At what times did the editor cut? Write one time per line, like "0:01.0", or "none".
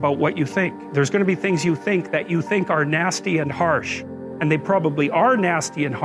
none